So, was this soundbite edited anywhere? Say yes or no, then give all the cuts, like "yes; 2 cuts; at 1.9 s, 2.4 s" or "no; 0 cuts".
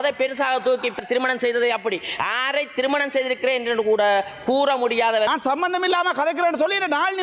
yes; 2 cuts; at 1.0 s, 5.3 s